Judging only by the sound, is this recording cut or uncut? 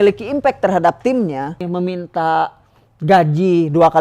cut